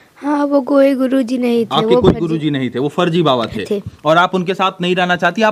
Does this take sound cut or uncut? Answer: uncut